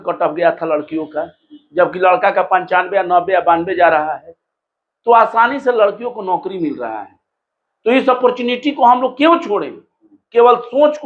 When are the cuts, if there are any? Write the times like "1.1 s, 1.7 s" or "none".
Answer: none